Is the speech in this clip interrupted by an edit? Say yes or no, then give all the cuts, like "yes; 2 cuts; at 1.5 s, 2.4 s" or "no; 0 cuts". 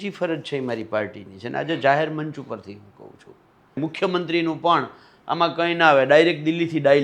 yes; 1 cut; at 3.8 s